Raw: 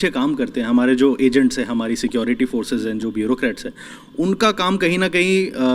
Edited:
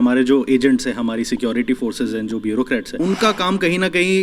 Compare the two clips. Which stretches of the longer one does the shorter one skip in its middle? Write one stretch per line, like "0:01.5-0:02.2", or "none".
0:03.6-0:04.1